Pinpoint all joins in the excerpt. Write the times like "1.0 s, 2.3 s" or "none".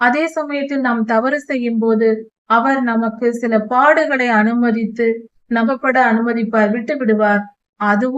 5.8 s

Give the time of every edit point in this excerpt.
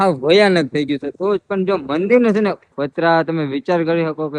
2.7 s

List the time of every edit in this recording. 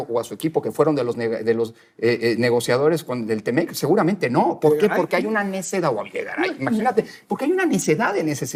none

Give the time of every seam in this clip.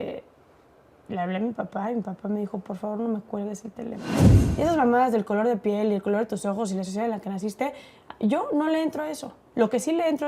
4.2 s

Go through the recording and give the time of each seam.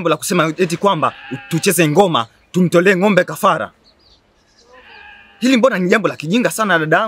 none

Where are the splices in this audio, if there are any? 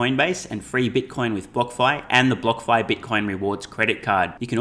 none

